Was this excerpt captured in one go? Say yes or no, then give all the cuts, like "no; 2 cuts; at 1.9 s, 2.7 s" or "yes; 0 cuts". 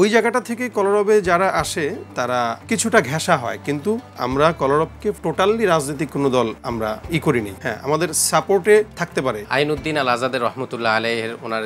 no; 6 cuts; at 2.6 s, 4.1 s, 5.2 s, 6.8 s, 7.5 s, 9.1 s